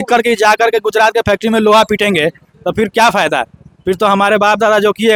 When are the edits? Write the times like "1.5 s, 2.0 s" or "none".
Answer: none